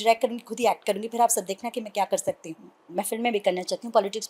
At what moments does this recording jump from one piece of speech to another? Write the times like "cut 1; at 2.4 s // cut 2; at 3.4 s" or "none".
cut 1; at 2.9 s